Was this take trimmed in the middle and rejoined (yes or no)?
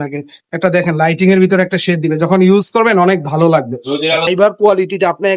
yes